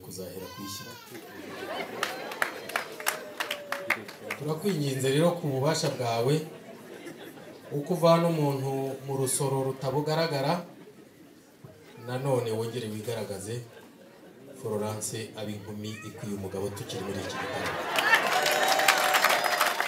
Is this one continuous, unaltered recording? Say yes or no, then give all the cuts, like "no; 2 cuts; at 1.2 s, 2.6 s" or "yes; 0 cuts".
yes; 0 cuts